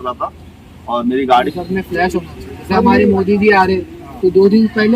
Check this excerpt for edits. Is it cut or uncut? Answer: cut